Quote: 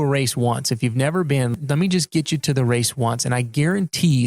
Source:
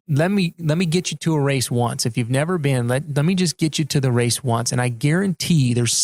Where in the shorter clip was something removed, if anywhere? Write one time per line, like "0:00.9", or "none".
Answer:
0:01.5